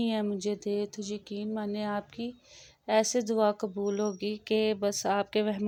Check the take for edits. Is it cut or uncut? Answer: uncut